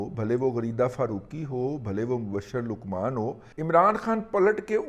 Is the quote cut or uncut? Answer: cut